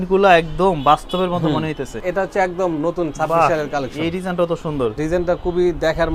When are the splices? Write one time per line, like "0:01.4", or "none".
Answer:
0:02.0
0:05.0